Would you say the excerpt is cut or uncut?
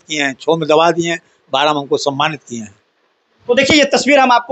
uncut